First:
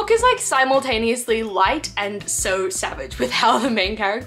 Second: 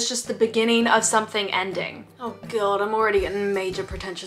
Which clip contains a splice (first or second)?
second